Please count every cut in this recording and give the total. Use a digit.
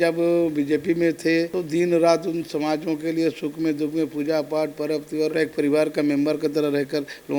0